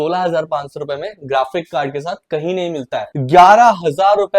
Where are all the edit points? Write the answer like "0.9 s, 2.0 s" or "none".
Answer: 3.1 s